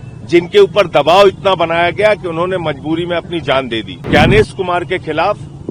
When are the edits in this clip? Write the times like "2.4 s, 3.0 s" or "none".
4.1 s